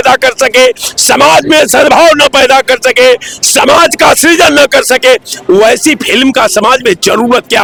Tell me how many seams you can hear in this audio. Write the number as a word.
zero